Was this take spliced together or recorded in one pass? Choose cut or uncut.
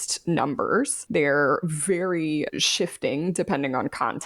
cut